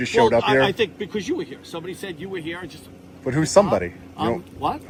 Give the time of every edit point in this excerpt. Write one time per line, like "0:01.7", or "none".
none

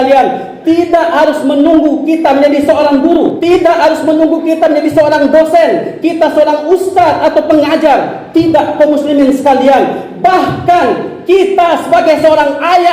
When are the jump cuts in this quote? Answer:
0:03.4

